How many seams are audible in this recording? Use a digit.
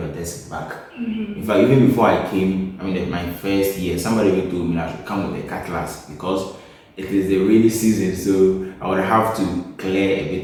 0